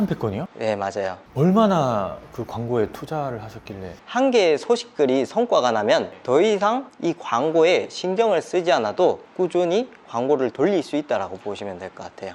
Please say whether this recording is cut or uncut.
cut